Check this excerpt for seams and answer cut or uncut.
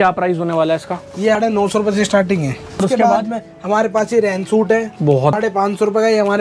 cut